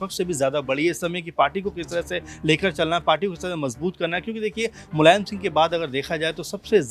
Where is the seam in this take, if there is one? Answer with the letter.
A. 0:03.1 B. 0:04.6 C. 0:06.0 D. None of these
D